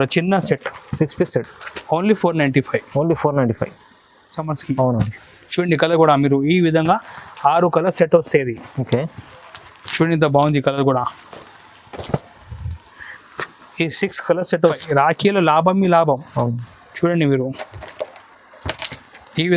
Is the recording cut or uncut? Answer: cut